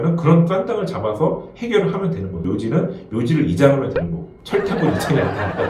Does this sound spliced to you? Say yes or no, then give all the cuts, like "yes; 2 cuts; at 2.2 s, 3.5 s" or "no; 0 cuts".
no; 0 cuts